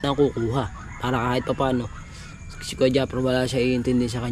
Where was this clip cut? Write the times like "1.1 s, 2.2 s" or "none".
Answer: none